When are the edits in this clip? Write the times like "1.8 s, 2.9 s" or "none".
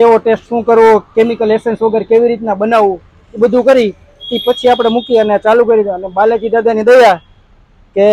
none